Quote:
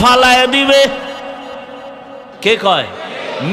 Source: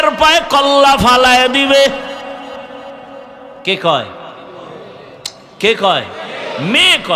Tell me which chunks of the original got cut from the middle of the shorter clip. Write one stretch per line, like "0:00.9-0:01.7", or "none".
0:03.3-0:05.5